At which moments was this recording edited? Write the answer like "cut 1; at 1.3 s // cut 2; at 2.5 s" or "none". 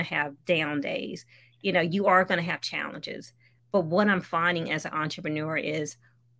none